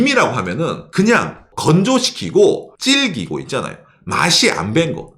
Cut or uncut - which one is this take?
cut